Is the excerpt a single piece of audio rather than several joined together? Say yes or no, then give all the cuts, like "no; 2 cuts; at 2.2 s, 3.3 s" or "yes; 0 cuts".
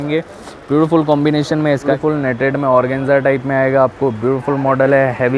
no; 1 cut; at 1.9 s